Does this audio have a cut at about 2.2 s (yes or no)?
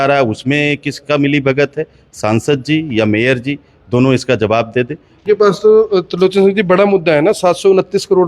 no